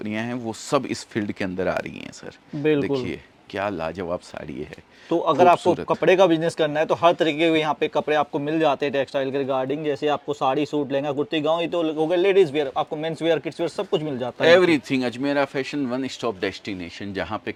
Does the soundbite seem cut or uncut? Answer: uncut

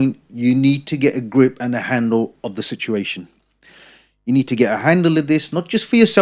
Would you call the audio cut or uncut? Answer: uncut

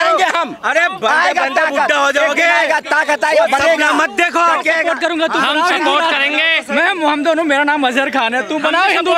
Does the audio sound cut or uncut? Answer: uncut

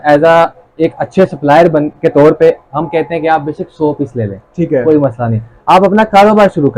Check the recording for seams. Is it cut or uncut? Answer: uncut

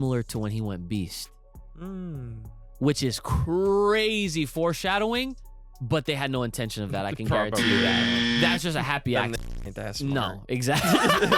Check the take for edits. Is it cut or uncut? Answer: uncut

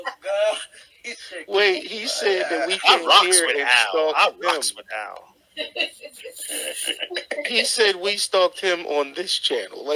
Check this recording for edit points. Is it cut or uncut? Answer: uncut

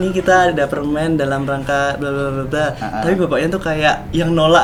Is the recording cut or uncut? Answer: uncut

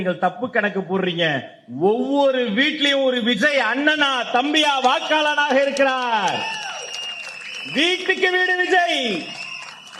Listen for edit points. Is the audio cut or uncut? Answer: uncut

